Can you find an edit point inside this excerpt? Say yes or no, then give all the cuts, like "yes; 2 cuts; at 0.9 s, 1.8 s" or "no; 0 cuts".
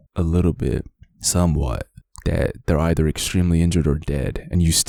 no; 0 cuts